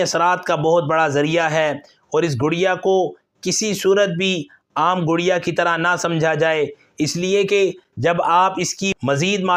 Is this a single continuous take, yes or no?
yes